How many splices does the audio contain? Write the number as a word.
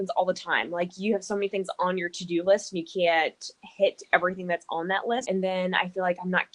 one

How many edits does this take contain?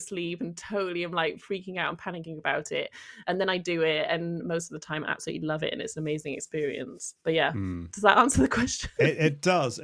zero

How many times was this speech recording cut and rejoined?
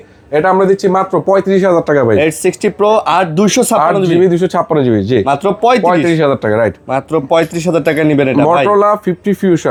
zero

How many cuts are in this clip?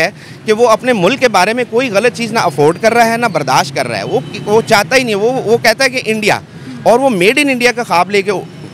zero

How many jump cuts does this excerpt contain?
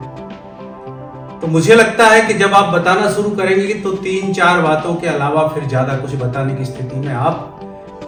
zero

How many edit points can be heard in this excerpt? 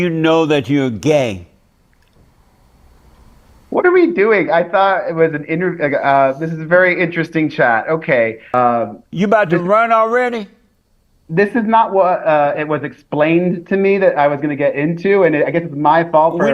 one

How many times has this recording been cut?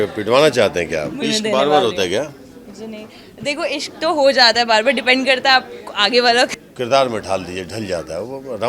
two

